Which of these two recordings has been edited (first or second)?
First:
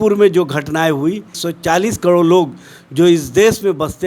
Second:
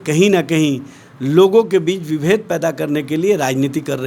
first